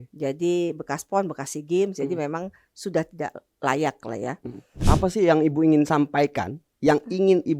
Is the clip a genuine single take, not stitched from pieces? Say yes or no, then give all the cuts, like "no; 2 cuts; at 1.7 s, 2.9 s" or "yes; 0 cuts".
no; 1 cut; at 4.7 s